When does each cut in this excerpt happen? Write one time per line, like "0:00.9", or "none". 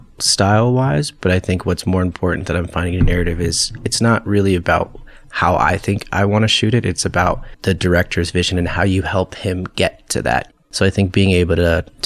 0:10.5